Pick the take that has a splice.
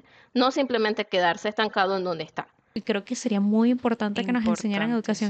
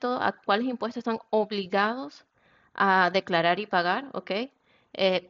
first; 1 cut; at 2.7 s

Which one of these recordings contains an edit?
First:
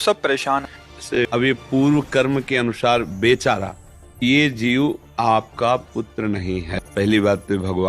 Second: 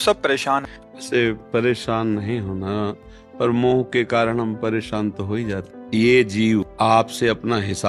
first; 2 cuts; at 1.0 s, 4.2 s

